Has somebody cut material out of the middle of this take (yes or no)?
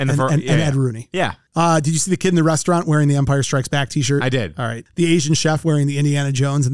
yes